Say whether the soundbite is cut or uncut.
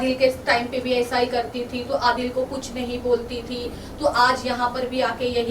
uncut